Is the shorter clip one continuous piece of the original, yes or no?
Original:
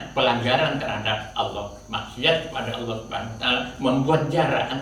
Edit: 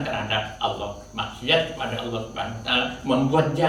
yes